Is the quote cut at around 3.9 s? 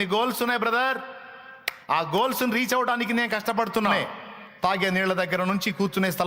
yes; 1 cut; at 3.9 s

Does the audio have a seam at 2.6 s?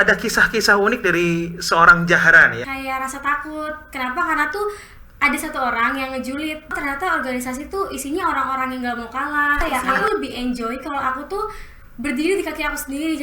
yes; 3 cuts; at 2.6 s, 6.7 s, 9.6 s

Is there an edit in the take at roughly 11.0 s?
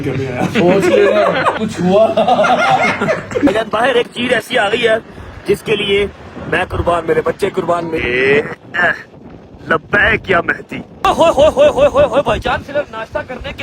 yes; 4 cuts; at 1.6 s, 3.5 s, 8.0 s, 11.0 s

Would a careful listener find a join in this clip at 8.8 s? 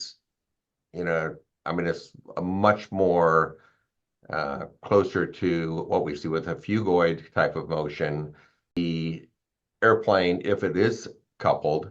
yes; 1 cut; at 8.8 s

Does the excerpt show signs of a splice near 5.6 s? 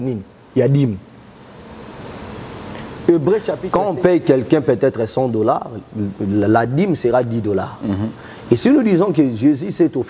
no; 1 cut; at 3.6 s

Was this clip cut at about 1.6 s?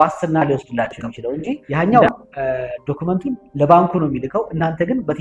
yes; 1 cut; at 1.6 s

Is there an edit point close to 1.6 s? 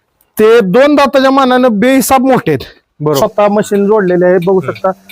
no; 1 cut; at 3.2 s

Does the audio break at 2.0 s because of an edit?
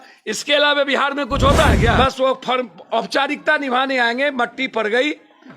yes; 1 cut; at 2.0 s

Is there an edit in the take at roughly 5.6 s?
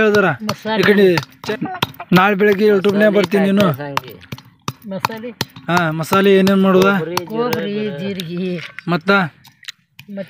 no; 1 cut; at 1.3 s

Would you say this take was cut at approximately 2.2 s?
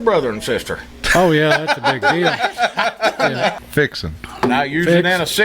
no; 1 cut; at 3.5 s

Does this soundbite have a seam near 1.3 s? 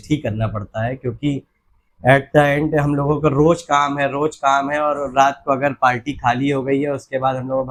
no; 0 cuts

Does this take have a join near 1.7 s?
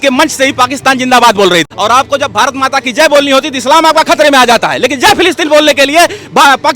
yes; 1 cut; at 1.7 s

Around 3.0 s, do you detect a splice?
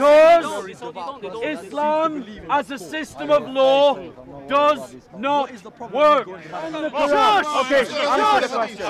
no; 1 cut; at 6.8 s

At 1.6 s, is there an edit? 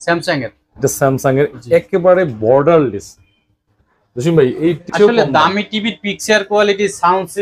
no; 1 cut; at 4.9 s

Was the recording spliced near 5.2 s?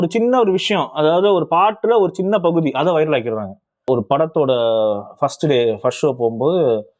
no; 1 cut; at 3.9 s

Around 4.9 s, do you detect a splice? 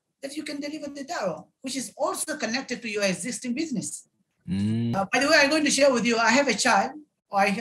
yes; 1 cut; at 4.9 s

